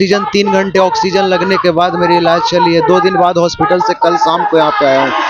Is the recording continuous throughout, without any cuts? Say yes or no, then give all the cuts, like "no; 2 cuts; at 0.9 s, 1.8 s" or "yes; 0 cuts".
yes; 0 cuts